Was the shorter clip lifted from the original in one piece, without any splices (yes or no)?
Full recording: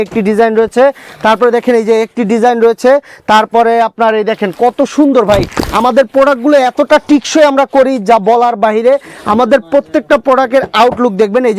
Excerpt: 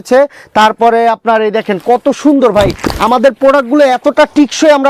yes